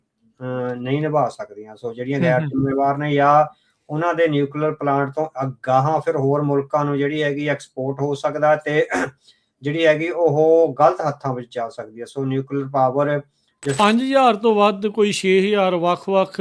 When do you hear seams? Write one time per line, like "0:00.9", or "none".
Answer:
0:13.8